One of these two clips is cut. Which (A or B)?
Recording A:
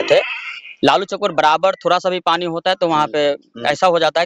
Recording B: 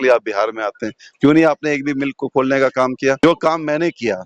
B